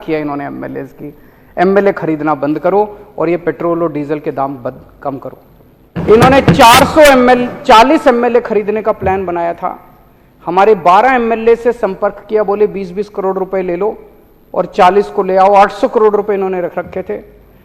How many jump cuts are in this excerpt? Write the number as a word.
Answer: one